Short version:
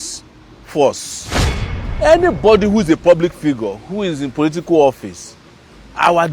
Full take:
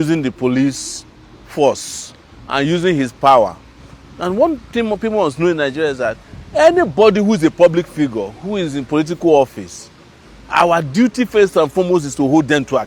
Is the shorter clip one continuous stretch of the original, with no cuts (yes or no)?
no